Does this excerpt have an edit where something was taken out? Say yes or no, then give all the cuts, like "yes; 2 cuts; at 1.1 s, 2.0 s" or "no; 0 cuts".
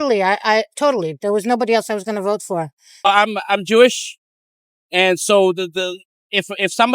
yes; 1 cut; at 2.8 s